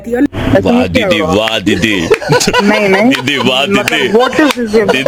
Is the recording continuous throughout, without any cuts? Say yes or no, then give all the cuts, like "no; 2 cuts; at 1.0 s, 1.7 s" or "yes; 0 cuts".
yes; 0 cuts